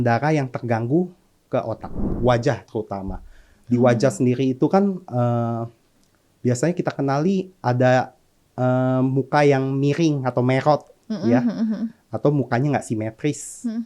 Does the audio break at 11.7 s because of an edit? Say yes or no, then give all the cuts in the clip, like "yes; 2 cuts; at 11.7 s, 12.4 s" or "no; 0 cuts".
no; 1 cut; at 2.1 s